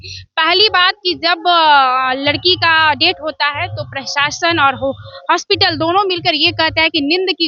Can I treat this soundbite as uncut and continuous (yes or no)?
yes